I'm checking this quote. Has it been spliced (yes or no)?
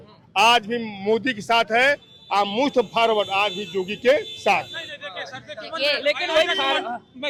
no